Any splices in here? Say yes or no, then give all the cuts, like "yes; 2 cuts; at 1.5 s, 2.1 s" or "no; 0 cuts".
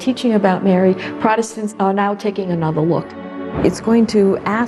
yes; 2 cuts; at 1.7 s, 3.6 s